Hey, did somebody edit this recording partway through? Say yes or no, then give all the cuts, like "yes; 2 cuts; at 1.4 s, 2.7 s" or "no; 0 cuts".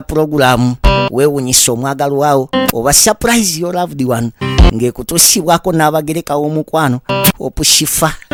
no; 0 cuts